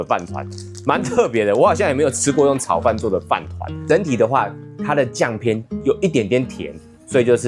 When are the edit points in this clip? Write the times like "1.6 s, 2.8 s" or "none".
3.7 s